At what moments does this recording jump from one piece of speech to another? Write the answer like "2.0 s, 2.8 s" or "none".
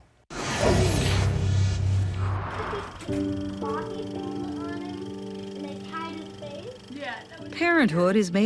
2.6 s